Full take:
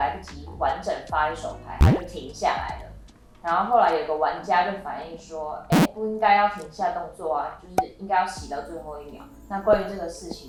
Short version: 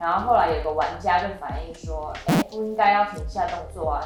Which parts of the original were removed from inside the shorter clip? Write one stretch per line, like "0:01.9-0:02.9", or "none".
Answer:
none